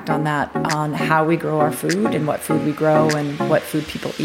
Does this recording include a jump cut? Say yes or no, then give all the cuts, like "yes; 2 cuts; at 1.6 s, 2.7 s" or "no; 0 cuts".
no; 0 cuts